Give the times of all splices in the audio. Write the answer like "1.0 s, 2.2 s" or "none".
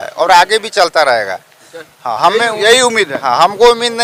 none